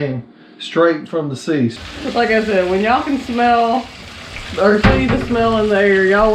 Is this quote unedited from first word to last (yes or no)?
no